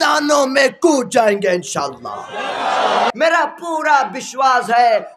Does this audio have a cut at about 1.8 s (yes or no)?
no